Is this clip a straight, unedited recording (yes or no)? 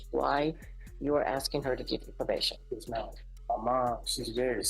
no